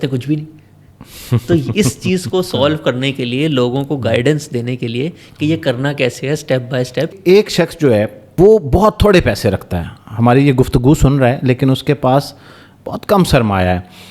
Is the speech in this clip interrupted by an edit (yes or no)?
yes